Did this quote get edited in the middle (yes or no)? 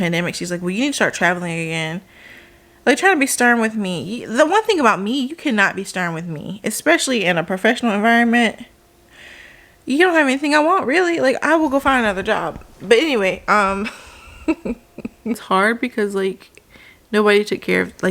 yes